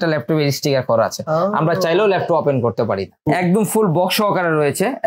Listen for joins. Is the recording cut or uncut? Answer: cut